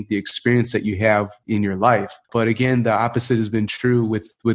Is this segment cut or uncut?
cut